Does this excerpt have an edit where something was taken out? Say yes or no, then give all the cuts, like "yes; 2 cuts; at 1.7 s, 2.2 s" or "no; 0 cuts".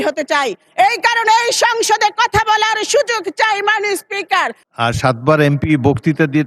yes; 1 cut; at 4.6 s